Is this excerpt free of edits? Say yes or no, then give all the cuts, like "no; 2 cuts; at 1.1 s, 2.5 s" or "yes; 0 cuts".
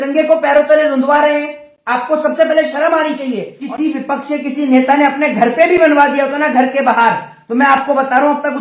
no; 1 cut; at 3.5 s